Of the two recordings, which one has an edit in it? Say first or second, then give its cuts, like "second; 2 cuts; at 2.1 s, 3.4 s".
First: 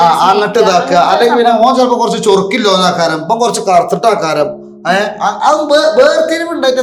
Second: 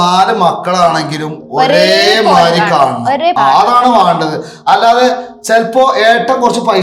second; 1 cut; at 3.4 s